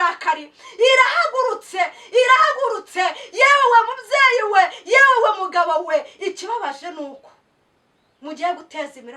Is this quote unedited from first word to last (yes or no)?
yes